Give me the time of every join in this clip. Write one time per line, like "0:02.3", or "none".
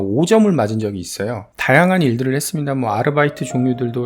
0:01.5